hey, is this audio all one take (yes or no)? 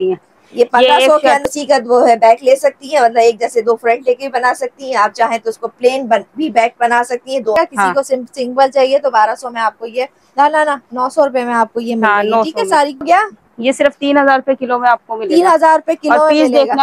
no